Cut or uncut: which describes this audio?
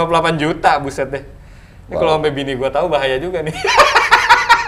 uncut